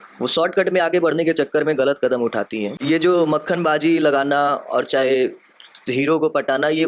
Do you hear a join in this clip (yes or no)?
yes